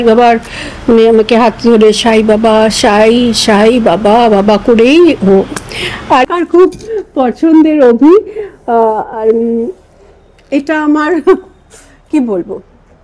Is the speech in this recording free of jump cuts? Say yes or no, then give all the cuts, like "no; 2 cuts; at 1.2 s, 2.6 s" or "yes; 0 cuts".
no; 1 cut; at 6.3 s